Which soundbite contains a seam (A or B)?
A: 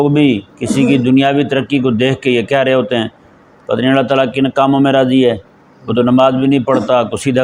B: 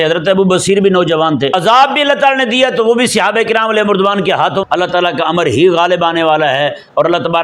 B